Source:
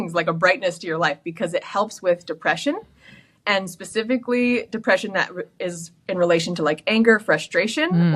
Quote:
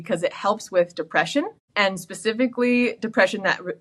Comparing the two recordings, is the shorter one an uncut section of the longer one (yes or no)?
no